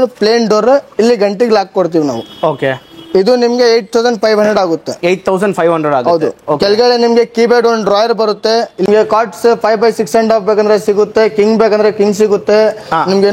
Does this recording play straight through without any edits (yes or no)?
no